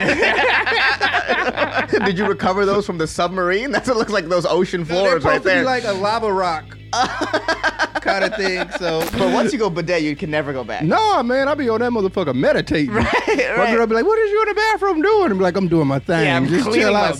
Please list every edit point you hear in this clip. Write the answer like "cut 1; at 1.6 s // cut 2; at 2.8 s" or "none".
cut 1; at 1.9 s // cut 2; at 9.1 s

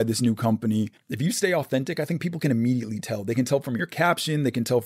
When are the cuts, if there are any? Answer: cut 1; at 1.0 s

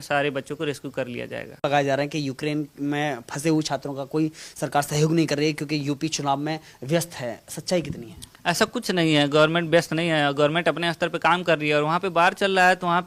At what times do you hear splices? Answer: none

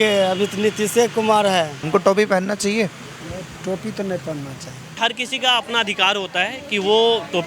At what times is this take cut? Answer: cut 1; at 1.8 s // cut 2; at 4.9 s

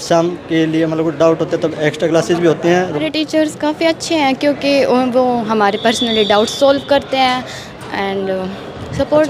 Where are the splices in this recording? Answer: cut 1; at 3.0 s

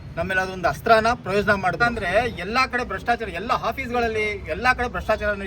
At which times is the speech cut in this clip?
cut 1; at 1.8 s

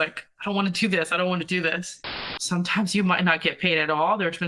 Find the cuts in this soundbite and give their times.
cut 1; at 2.1 s

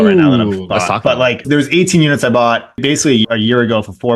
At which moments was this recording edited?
cut 1; at 1.4 s // cut 2; at 2.8 s

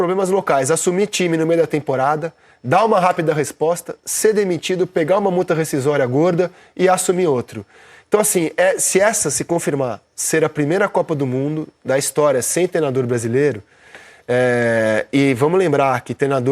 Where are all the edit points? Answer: none

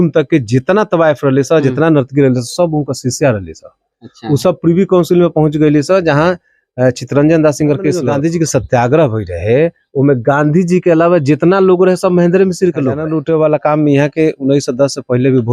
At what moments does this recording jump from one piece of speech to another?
cut 1; at 8.1 s // cut 2; at 13.0 s

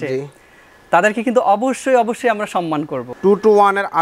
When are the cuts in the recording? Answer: cut 1; at 3.0 s

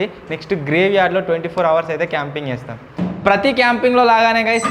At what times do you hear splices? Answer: cut 1; at 2.9 s

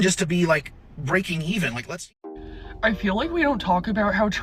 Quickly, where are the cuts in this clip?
cut 1; at 2.0 s

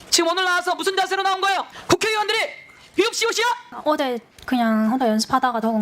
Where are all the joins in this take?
cut 1; at 1.7 s // cut 2; at 3.7 s

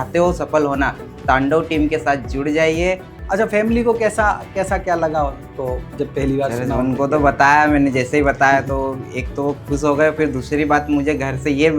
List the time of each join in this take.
cut 1; at 3.2 s

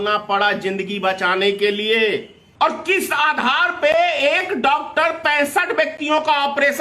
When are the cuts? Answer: cut 1; at 2.4 s

